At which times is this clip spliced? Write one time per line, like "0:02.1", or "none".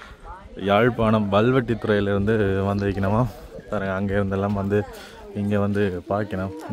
none

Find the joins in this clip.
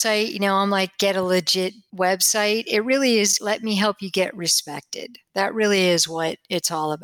0:01.8
0:03.4

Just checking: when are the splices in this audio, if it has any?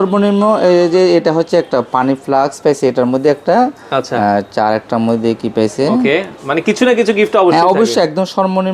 none

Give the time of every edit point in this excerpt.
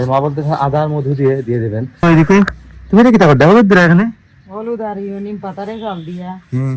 0:02.0

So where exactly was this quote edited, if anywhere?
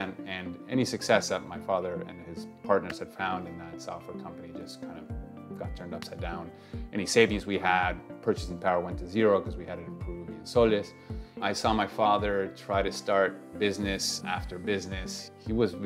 0:11.4
0:13.5

